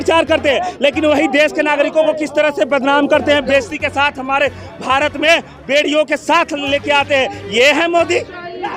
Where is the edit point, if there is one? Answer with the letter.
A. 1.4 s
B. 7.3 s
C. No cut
C